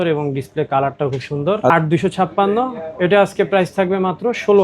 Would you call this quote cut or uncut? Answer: cut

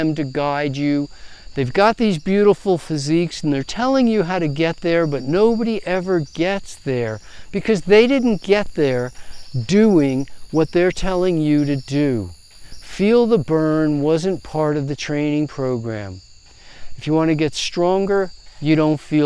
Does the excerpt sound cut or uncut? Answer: uncut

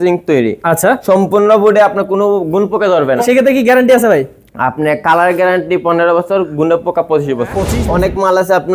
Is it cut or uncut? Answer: cut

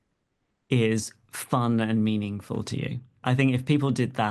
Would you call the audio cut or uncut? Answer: cut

